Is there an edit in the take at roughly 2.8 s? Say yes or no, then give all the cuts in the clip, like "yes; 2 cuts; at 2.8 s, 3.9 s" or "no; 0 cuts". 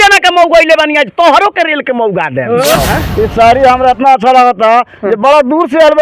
yes; 1 cut; at 2.8 s